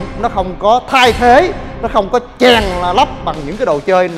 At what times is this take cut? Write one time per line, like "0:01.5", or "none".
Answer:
none